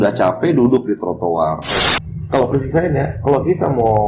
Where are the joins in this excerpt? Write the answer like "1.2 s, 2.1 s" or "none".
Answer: 1.9 s